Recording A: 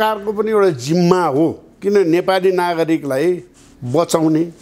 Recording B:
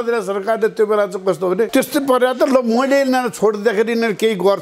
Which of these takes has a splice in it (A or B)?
B